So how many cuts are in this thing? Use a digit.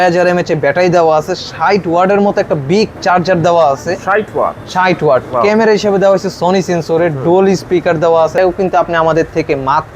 1